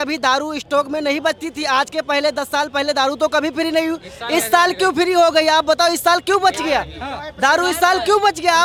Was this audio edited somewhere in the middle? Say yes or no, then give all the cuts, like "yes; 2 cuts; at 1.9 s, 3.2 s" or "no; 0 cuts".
no; 0 cuts